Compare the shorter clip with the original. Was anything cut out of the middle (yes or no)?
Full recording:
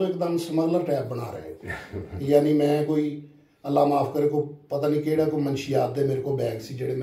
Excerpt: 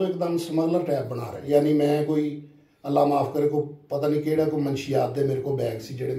yes